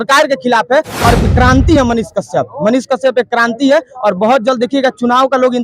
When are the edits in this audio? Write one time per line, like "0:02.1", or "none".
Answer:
0:01.2